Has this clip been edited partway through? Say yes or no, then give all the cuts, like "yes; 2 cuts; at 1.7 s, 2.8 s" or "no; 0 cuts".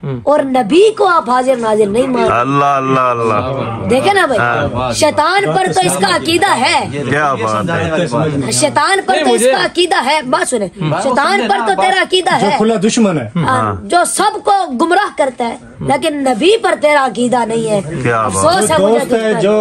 no; 0 cuts